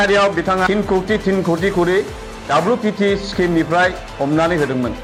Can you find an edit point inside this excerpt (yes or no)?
no